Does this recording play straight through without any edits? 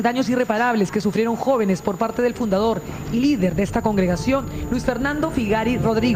yes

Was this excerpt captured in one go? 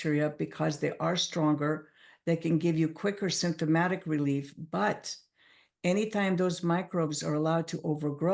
yes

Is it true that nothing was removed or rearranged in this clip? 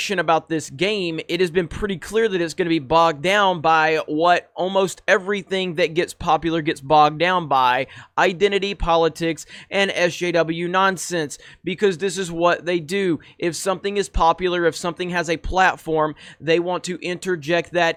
yes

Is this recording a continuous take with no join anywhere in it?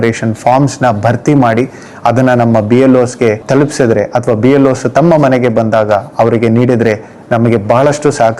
yes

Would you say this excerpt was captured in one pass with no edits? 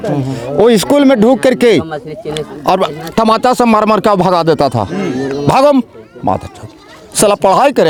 yes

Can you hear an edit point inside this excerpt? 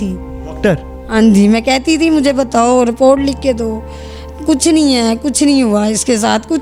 no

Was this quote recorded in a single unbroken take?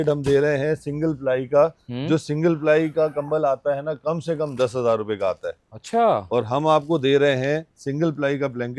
yes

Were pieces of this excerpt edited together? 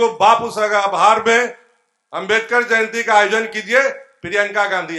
no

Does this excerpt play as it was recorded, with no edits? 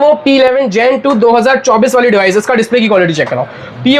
yes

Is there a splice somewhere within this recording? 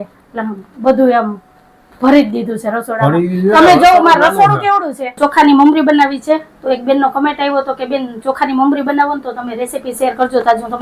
yes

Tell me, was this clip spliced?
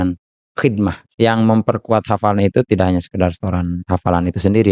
yes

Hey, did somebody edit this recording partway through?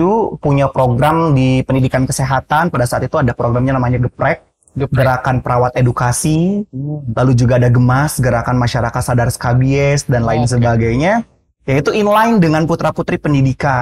no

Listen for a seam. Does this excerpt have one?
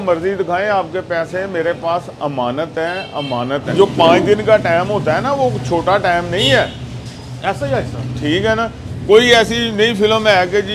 yes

